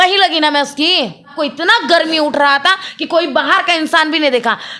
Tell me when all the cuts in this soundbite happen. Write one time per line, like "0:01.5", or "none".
0:01.3